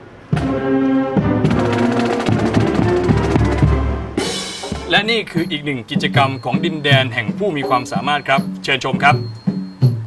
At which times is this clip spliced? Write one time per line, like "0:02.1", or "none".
0:04.8